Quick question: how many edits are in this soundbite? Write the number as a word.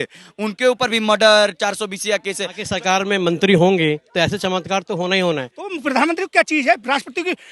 two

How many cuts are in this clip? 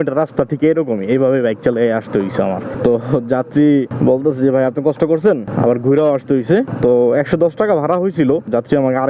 zero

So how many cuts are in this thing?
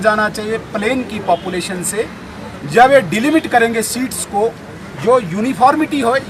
zero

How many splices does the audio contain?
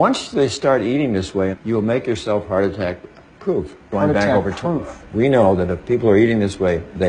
zero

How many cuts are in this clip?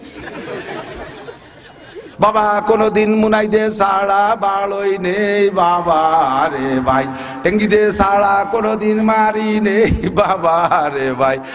one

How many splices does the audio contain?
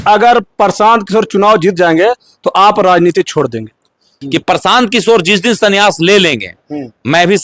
one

